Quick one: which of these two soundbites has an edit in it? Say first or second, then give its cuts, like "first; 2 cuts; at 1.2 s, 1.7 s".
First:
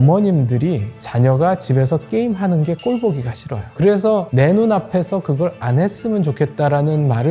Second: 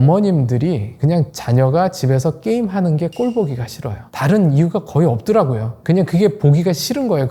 first; 2 cuts; at 1.0 s, 3.7 s